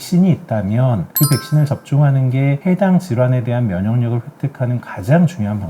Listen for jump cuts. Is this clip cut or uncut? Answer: uncut